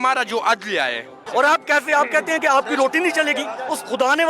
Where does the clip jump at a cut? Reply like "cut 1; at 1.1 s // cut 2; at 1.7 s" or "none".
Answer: cut 1; at 1.1 s